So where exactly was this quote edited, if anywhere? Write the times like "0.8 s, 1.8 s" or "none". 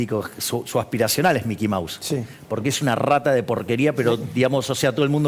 none